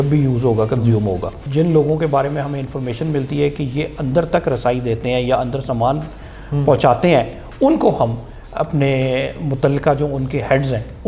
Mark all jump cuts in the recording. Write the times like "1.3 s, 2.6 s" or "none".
1.4 s